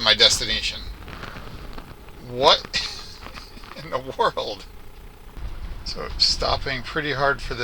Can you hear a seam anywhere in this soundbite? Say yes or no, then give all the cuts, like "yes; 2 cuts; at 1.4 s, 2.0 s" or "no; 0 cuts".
yes; 1 cut; at 5.4 s